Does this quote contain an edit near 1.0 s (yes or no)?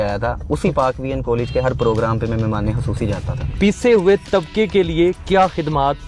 no